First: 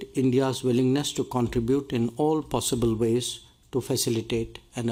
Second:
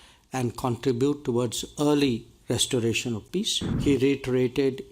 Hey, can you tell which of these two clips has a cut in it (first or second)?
second